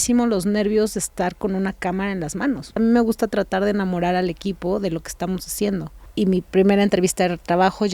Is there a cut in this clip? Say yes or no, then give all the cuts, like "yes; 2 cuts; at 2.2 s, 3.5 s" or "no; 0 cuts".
yes; 2 cuts; at 2.8 s, 6.0 s